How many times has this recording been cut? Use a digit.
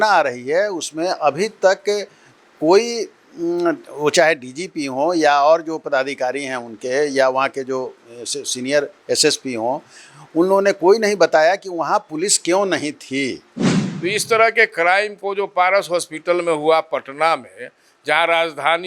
1